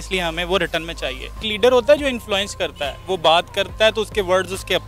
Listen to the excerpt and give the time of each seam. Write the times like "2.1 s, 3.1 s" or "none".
1.5 s